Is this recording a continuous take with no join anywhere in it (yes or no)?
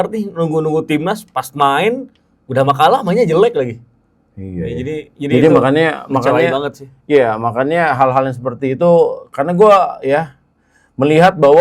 yes